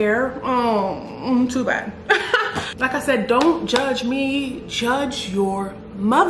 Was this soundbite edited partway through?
yes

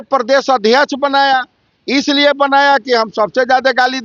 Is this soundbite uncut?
yes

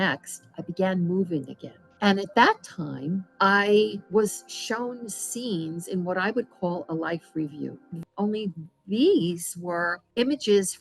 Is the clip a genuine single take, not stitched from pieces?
no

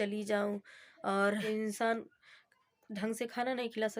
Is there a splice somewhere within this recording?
yes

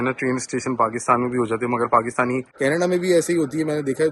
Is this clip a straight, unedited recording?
no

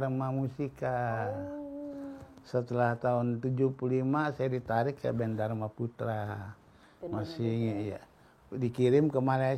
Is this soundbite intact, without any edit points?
yes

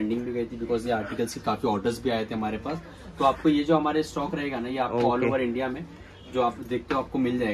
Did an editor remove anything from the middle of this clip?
no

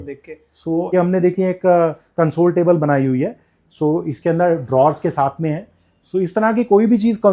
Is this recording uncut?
no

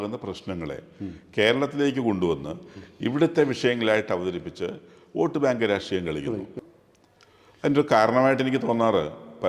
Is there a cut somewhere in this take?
yes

